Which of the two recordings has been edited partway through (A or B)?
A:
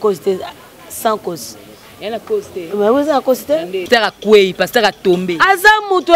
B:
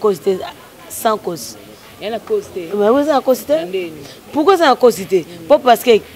A